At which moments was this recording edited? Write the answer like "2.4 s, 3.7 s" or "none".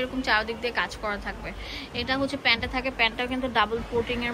none

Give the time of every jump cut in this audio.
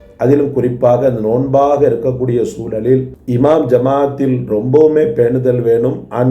3.3 s

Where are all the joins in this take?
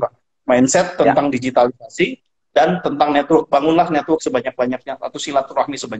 none

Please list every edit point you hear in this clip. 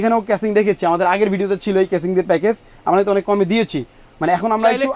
none

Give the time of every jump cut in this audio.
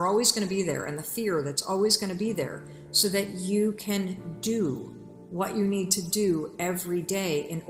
none

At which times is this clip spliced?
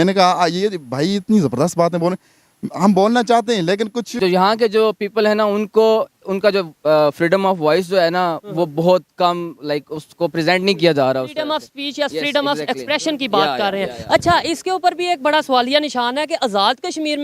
4.2 s

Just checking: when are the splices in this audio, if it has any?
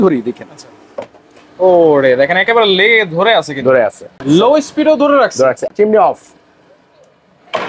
4.1 s, 5.7 s

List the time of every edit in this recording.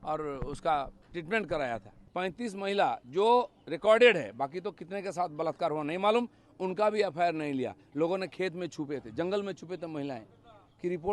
2.0 s

